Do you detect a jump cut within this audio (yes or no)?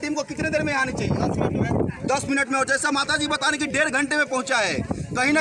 no